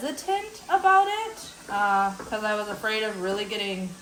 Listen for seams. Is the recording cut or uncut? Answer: uncut